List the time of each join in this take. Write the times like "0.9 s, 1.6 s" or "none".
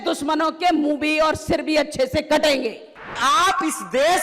3.2 s